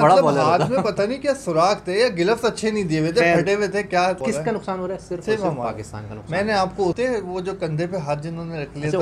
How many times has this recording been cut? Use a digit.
2